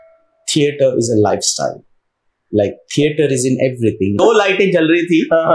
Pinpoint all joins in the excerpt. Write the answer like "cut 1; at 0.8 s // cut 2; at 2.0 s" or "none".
cut 1; at 4.2 s